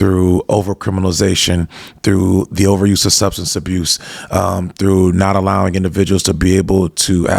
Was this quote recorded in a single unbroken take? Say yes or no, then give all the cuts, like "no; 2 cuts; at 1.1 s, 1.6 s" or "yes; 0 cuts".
yes; 0 cuts